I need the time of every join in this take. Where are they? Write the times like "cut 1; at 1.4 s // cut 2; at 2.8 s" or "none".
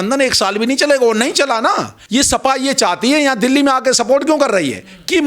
cut 1; at 1.9 s